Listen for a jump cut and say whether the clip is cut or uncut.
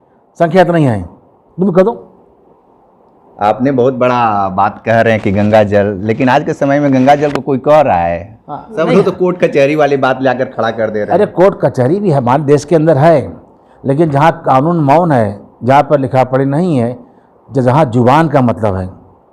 uncut